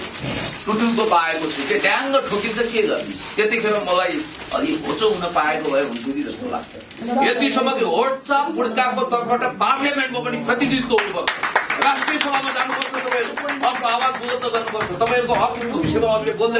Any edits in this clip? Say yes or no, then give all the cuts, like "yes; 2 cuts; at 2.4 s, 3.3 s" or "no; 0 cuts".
yes; 1 cut; at 7.0 s